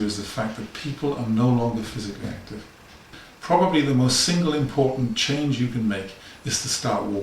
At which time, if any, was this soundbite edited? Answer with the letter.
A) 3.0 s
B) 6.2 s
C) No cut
A